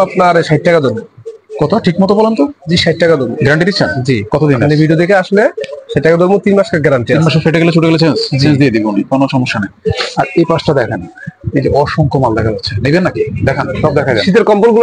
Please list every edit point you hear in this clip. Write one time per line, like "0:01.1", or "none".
none

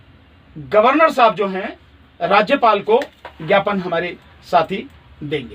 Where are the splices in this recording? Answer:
none

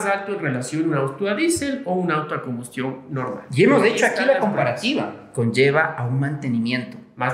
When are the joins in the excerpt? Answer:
0:05.2

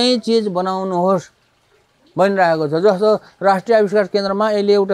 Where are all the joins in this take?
none

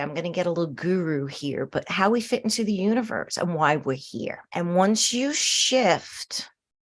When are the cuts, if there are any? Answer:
0:04.4

